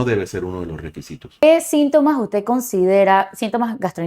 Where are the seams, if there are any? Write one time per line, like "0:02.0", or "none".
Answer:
0:01.4